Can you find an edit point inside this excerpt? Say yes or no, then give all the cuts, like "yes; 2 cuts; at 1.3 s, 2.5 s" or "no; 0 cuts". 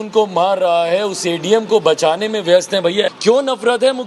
yes; 1 cut; at 3.1 s